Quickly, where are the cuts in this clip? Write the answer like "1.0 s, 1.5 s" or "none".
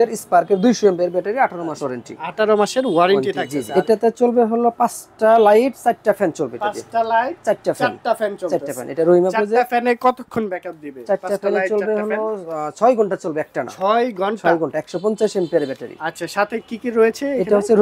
3.6 s